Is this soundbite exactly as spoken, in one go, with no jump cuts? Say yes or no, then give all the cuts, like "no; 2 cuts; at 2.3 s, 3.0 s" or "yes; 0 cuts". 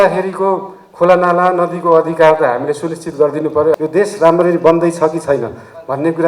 no; 1 cut; at 3.8 s